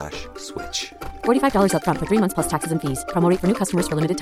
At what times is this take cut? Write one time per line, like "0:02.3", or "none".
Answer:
none